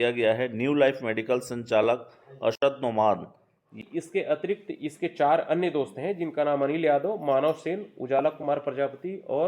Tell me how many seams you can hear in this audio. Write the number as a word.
one